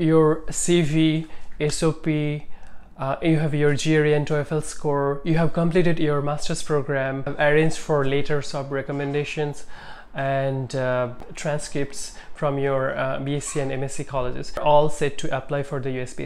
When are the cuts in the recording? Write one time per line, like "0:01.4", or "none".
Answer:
0:07.3
0:11.3
0:14.6

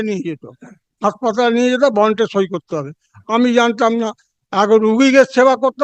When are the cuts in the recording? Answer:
none

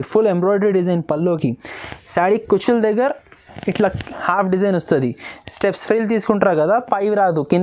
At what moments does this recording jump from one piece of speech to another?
none

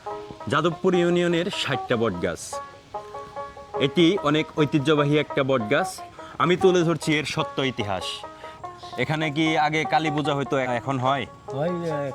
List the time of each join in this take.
0:06.0
0:08.6
0:10.7

